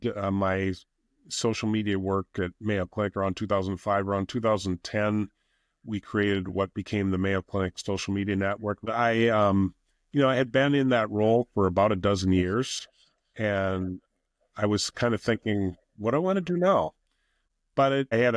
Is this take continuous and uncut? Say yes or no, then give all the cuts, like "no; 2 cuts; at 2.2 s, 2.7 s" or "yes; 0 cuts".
no; 2 cuts; at 8.9 s, 17.5 s